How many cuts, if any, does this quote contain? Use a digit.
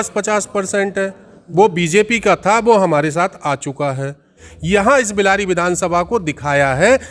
1